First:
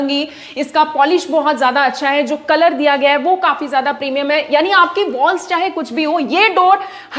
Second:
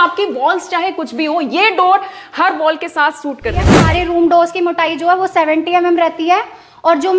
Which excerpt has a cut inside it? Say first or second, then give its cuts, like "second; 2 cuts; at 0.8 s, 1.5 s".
second; 1 cut; at 3.7 s